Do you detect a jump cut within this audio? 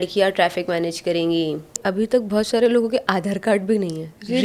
yes; 1 cut; at 1.8 s

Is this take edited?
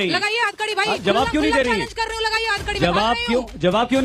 no; 0 cuts

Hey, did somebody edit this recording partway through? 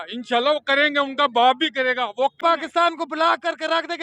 yes; 1 cut; at 2.4 s

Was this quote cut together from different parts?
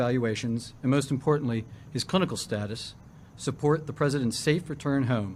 no; 0 cuts

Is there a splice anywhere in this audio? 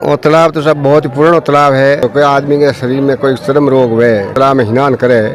yes; 2 cuts; at 2.0 s, 4.3 s

